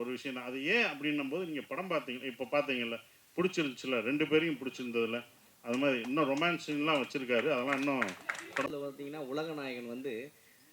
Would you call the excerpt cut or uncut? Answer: cut